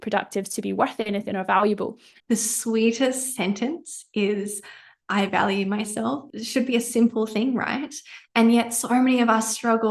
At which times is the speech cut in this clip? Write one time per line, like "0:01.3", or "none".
0:02.2
0:06.3